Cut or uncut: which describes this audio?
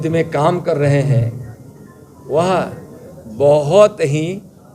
uncut